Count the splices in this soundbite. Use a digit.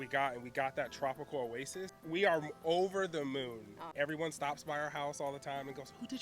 2